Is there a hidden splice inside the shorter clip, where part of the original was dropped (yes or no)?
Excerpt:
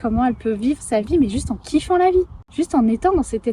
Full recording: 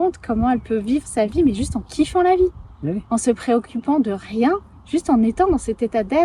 yes